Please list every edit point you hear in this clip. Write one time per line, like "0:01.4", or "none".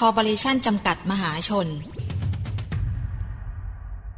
0:02.0